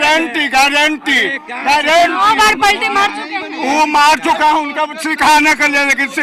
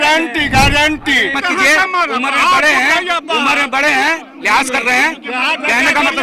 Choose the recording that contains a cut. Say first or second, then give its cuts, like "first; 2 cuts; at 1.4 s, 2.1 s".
second; 1 cut; at 1.4 s